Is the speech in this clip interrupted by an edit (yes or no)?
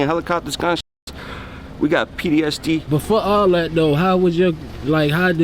yes